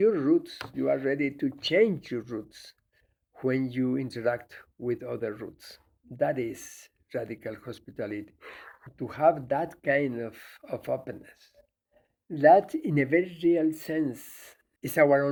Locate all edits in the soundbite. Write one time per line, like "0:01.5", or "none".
none

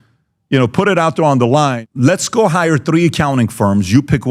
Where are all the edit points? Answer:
0:01.8

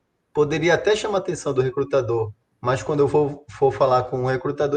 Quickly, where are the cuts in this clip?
0:02.4

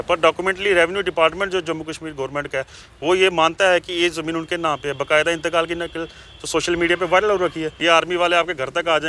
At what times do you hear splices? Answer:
0:07.8

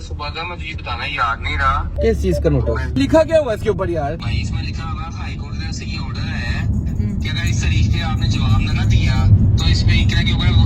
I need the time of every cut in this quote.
0:01.9
0:04.2

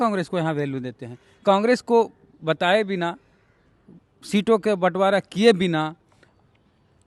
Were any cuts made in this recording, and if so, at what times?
none

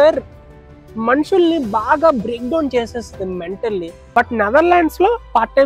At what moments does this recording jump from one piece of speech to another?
0:04.0

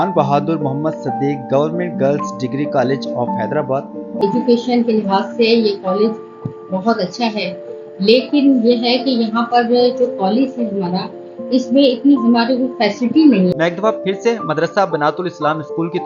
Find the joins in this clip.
0:04.2
0:13.5

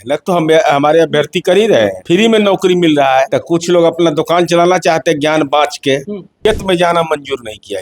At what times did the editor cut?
0:02.0
0:03.4
0:06.4

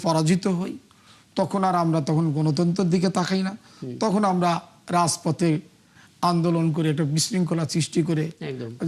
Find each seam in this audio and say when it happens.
none

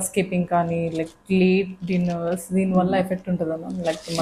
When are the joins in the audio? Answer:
none

